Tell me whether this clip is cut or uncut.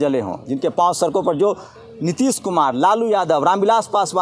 uncut